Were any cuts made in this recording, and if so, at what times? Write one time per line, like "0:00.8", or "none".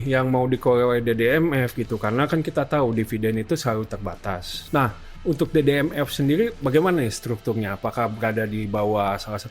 0:04.5